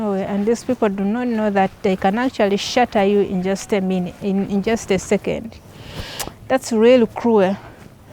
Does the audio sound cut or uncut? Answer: uncut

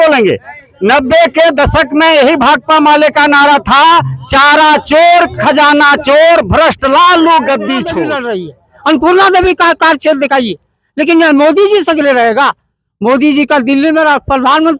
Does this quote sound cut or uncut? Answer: cut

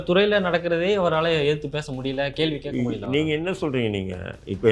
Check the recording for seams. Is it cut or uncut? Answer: uncut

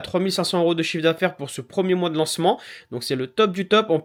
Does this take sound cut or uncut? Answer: uncut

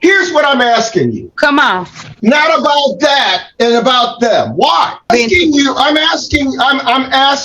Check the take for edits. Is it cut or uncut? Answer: cut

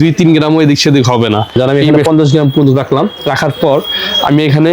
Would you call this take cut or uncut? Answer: cut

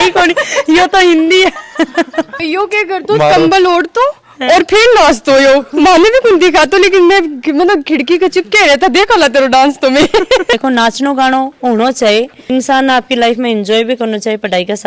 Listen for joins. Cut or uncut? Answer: uncut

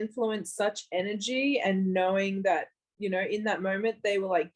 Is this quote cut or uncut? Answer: uncut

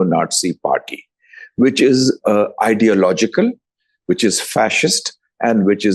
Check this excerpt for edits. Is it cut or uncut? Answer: uncut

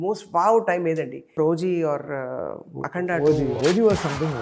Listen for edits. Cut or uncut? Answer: cut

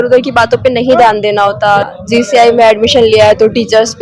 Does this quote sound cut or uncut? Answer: cut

